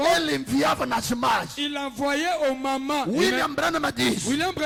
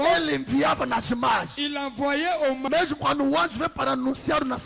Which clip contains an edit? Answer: second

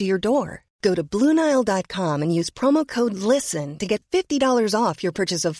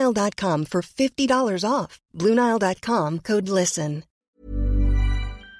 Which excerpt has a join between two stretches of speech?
second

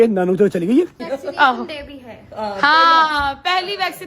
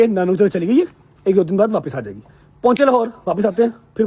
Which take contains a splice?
first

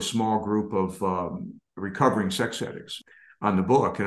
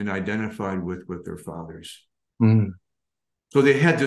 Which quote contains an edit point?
first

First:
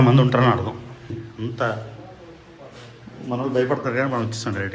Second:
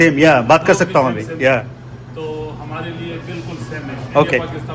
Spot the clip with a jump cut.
first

